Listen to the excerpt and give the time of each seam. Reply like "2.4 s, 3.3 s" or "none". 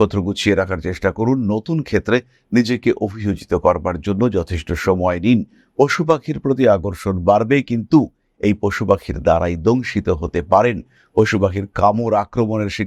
none